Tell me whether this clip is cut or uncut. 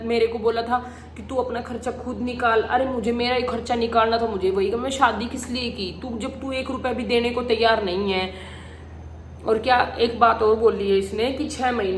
uncut